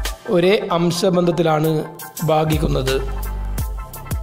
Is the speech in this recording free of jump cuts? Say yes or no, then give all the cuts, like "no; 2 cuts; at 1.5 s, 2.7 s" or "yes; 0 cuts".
no; 1 cut; at 3.1 s